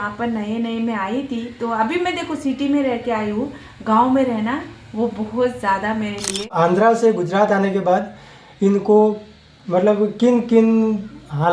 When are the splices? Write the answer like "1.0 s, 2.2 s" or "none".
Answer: 6.5 s